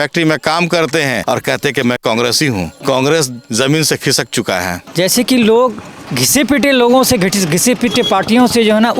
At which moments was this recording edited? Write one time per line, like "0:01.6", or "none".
0:01.2
0:02.7
0:04.8
0:06.1